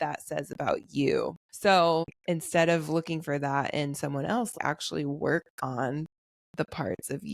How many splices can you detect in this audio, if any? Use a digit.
3